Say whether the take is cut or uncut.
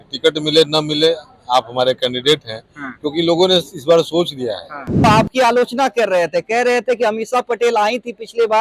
cut